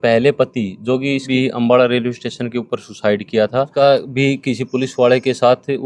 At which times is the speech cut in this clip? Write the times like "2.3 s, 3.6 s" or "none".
1.3 s, 3.7 s